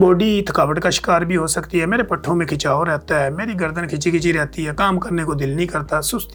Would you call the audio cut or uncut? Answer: uncut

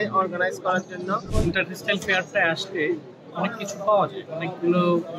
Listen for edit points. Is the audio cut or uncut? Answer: cut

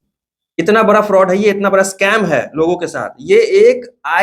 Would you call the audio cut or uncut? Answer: uncut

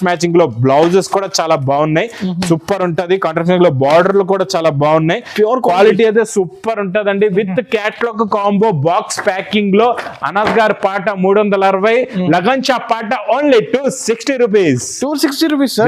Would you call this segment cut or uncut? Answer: uncut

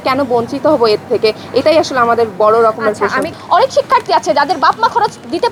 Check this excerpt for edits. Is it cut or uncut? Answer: uncut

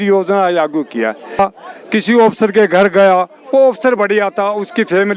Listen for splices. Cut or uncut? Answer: cut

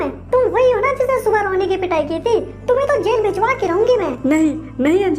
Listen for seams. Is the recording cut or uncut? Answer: cut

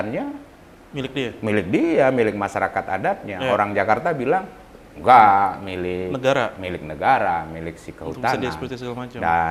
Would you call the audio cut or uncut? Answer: uncut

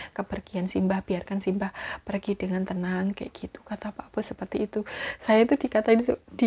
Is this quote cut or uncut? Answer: uncut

